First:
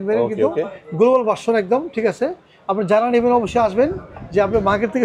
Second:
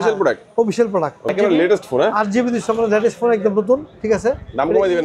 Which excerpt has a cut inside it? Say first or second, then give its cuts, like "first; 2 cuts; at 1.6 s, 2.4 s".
second; 1 cut; at 1.3 s